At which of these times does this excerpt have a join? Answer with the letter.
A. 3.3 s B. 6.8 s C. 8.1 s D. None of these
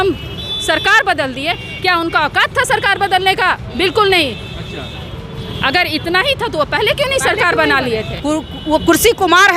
C